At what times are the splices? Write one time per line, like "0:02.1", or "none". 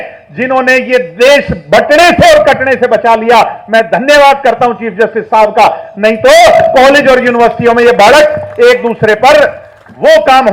none